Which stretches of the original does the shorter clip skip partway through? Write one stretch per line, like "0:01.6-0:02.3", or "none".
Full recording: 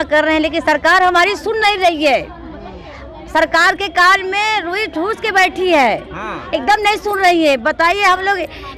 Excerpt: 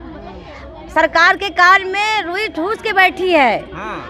none